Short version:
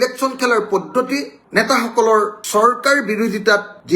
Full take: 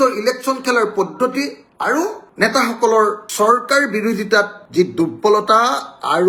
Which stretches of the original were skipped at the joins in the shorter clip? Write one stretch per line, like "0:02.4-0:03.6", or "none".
0:01.6-0:02.2